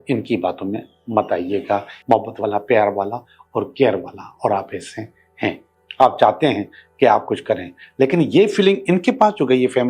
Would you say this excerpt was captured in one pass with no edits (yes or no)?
no